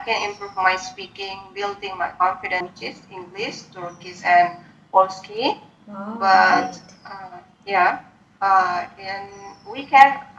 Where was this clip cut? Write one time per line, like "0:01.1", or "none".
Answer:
0:02.6